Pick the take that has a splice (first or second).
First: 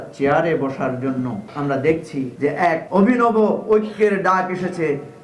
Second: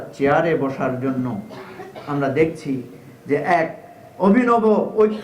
first